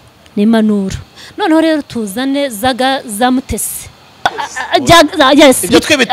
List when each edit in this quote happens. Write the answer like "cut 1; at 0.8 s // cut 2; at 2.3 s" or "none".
cut 1; at 4.4 s